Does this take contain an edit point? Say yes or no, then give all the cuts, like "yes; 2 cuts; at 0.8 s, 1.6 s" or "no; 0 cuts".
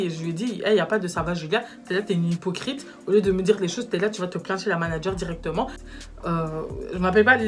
yes; 1 cut; at 5.8 s